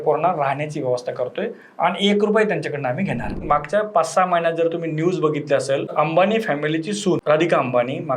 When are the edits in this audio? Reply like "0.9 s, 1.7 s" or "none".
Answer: 3.4 s, 5.9 s, 7.2 s

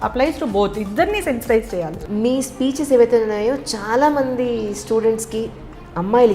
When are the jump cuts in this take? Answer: 2.0 s

